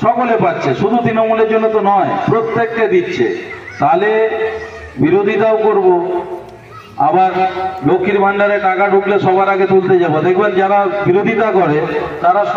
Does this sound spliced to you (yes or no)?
no